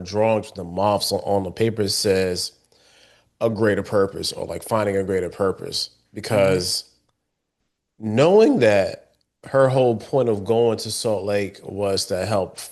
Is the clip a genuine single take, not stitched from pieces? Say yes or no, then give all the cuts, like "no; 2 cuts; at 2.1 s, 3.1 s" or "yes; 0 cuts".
yes; 0 cuts